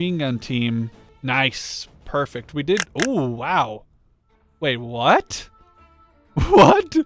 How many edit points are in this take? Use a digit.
1